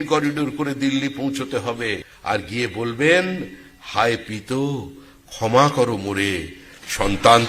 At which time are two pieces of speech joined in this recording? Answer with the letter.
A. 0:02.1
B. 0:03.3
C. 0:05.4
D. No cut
A